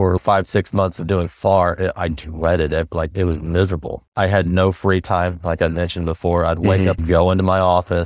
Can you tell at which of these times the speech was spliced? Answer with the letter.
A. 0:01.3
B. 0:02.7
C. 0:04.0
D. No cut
C